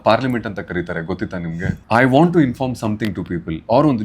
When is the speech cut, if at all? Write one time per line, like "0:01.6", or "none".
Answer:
0:01.8